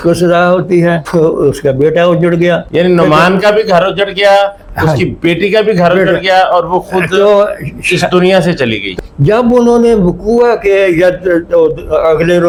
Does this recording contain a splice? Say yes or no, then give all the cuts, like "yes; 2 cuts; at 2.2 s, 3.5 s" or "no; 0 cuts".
no; 0 cuts